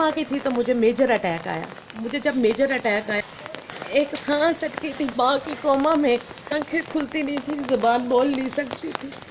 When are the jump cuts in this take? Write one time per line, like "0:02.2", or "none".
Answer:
0:03.3
0:06.5